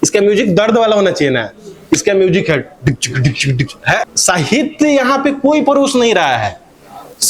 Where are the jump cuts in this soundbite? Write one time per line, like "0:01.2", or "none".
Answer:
0:04.1